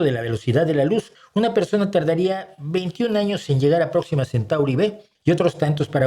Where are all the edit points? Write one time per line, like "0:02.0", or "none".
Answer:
0:01.1
0:05.1